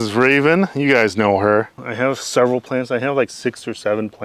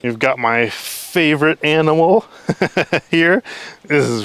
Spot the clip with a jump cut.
first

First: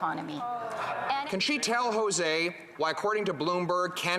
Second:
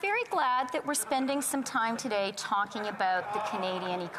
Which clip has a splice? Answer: first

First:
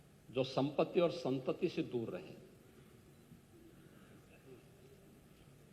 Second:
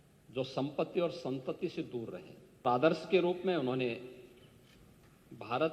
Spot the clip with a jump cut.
second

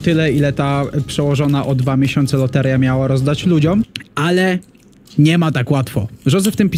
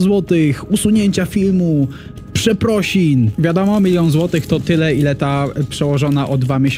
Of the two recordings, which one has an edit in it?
second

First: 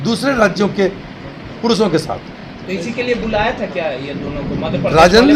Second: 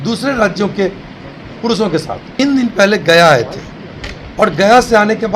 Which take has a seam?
second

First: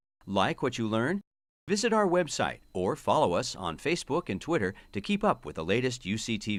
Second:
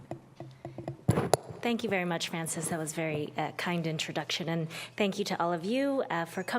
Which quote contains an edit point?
second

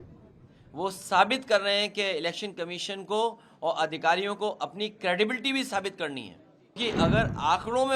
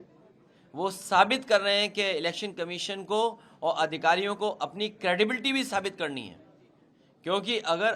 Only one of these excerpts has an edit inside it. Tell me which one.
first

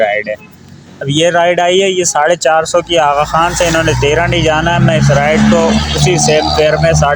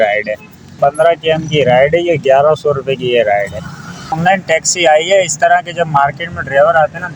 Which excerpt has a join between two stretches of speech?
second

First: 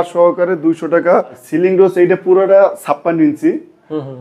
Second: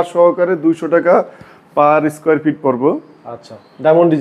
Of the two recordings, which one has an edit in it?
first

